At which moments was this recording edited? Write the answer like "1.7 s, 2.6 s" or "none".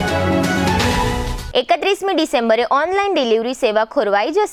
none

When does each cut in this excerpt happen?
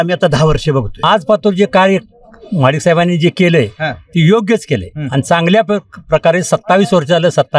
0.9 s

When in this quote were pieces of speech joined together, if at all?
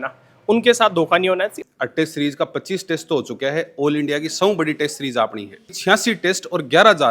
1.6 s, 5.8 s

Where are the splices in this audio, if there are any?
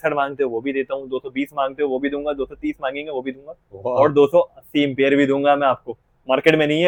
none

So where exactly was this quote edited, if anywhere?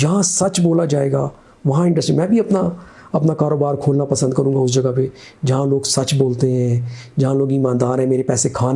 none

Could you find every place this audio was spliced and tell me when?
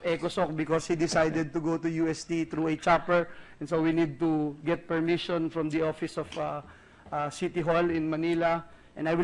3.8 s

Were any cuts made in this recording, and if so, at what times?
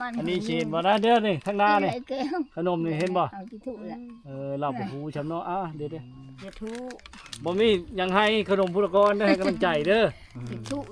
none

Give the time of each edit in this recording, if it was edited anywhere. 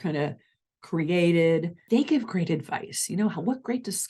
1.8 s

